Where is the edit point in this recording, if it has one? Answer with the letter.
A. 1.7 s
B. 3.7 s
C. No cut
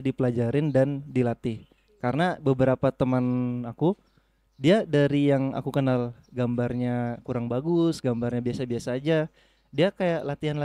C